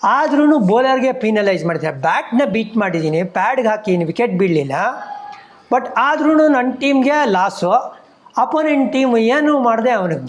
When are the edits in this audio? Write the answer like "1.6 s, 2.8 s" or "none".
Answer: none